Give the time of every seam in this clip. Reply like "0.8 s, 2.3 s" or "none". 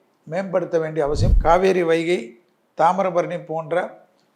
1.3 s